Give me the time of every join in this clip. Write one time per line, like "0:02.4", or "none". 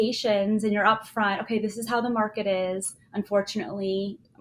none